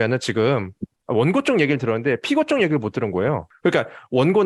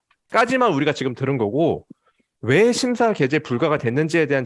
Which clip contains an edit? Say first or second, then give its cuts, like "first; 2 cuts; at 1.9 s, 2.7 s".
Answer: first; 2 cuts; at 1.0 s, 3.5 s